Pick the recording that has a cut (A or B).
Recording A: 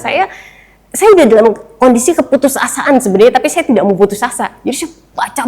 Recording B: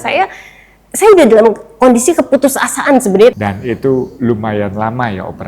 B